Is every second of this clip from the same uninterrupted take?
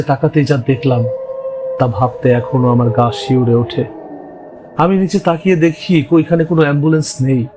yes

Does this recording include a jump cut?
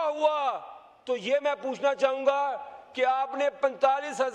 no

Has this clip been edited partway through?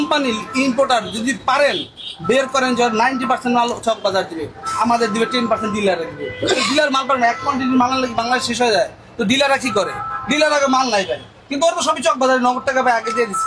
no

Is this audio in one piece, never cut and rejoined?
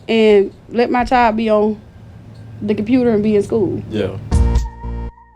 no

